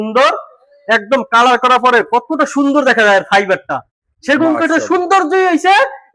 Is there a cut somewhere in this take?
no; 0 cuts

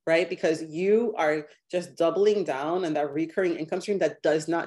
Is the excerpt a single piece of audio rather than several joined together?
yes; 0 cuts

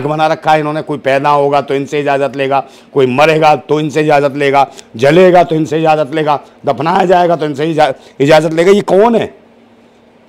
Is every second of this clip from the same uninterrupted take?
yes; 0 cuts

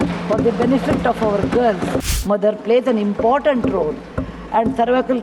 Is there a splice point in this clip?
yes; 1 cut; at 2.1 s

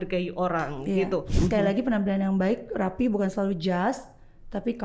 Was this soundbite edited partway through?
yes; 1 cut; at 1.3 s

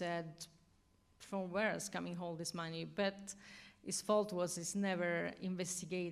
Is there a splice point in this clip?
yes; 1 cut; at 4.9 s

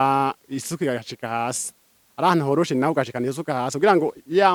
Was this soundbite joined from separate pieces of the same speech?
no; 0 cuts

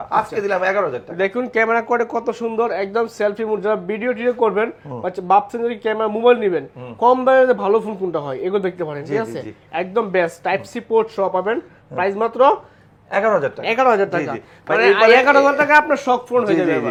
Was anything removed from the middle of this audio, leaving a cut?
no; 0 cuts

